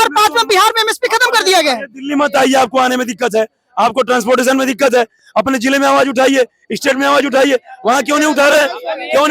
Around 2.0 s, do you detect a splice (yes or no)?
no